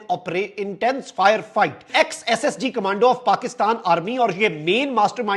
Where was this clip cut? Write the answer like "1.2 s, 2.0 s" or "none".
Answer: 1.8 s